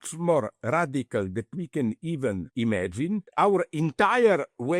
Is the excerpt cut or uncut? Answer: cut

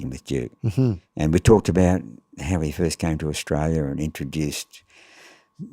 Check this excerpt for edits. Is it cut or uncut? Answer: cut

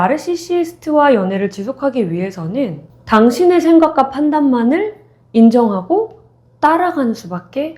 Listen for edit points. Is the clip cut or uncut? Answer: uncut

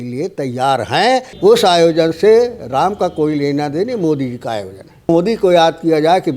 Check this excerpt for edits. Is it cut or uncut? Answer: cut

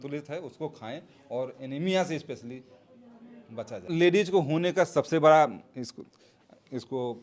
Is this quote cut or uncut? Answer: cut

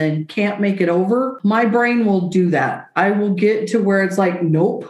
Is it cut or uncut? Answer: cut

